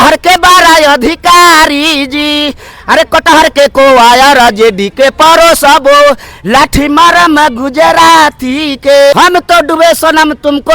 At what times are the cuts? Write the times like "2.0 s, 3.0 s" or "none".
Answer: 9.1 s